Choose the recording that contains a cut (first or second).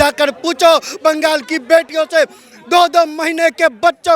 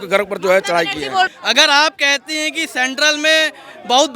second